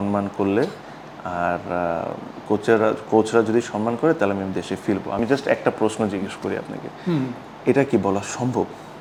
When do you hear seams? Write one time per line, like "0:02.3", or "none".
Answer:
none